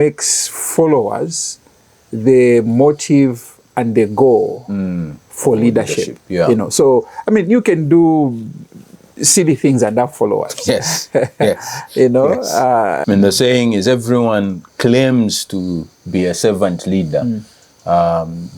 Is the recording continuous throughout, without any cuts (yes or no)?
no